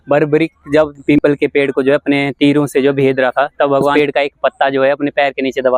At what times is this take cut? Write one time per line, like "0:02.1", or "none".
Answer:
0:01.0
0:03.9